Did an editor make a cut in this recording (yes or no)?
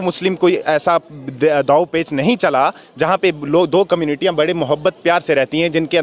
no